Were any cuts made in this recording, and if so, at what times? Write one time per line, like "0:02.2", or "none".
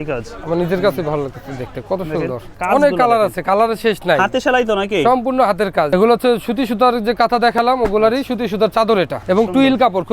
0:02.5
0:05.9
0:09.2